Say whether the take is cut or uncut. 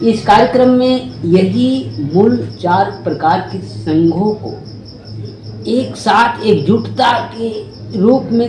uncut